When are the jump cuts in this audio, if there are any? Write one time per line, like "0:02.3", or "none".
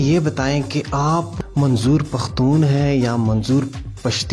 0:01.3